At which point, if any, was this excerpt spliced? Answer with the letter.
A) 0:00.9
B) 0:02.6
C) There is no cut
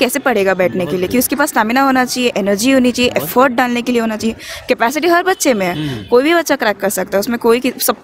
C